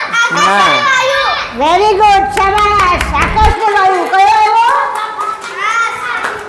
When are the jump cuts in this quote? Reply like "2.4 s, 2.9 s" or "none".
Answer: none